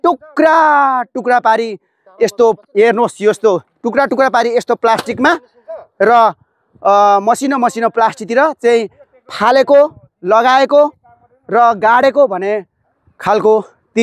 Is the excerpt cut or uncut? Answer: uncut